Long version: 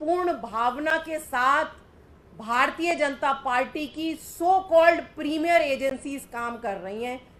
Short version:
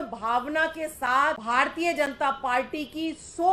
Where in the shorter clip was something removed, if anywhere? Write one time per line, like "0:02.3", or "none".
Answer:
0:01.4

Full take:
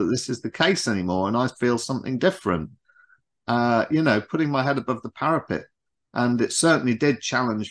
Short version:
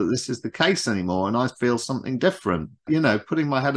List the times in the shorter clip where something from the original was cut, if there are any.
0:02.9

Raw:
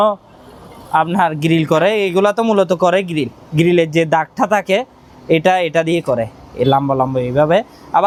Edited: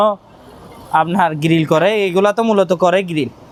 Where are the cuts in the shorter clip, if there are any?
none

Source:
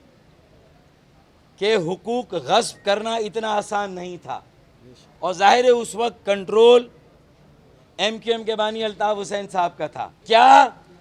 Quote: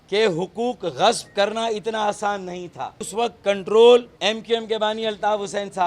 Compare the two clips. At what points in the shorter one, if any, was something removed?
0:03.1
0:04.1

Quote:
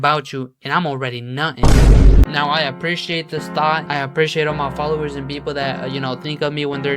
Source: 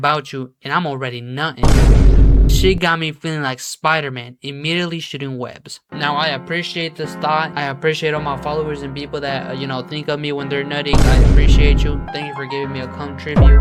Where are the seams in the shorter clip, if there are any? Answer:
0:02.2

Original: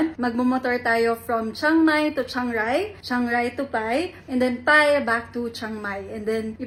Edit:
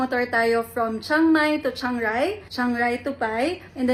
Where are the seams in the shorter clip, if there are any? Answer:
none

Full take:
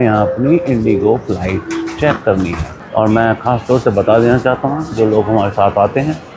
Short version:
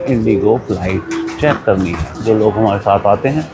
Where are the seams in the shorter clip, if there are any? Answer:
0:02.1

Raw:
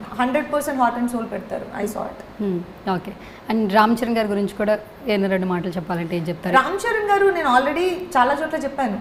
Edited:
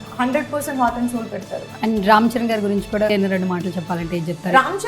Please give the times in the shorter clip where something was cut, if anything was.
0:01.6
0:03.1

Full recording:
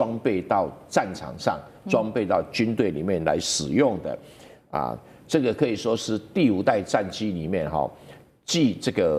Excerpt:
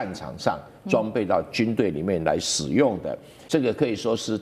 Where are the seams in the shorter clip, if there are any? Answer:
0:03.3

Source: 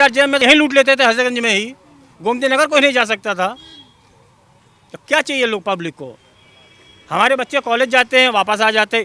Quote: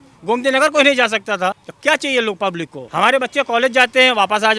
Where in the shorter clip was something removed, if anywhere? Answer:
0:01.7
0:02.8

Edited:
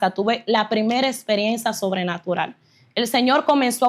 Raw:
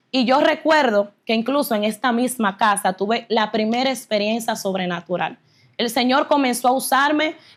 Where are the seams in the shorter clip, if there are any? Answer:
none

